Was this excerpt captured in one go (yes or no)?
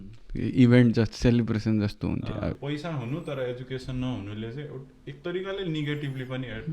no